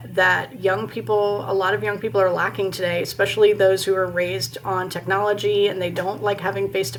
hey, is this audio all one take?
yes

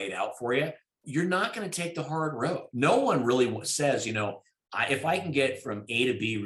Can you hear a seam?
yes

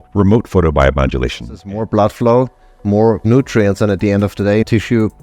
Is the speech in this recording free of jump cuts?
no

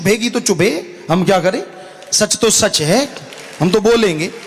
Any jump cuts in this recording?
no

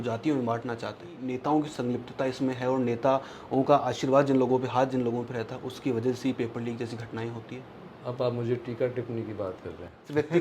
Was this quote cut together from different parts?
yes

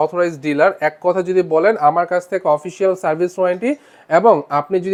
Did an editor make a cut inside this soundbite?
no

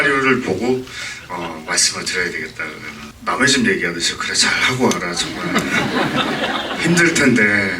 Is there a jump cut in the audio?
yes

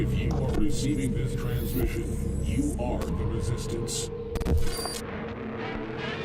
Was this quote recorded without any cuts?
yes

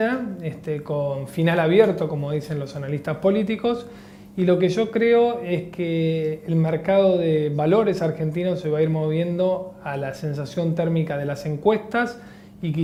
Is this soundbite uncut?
yes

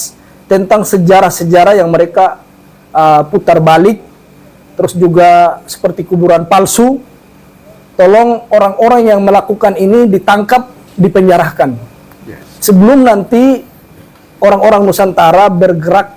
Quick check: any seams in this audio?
no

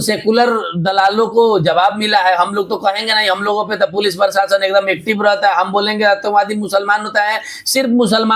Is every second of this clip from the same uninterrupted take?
yes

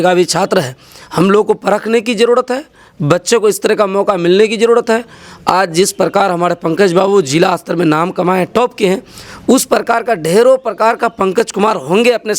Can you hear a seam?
no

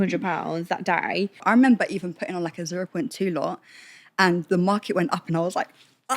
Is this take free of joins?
no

